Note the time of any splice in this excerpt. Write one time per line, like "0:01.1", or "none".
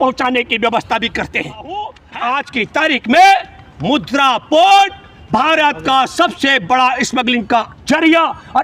0:01.7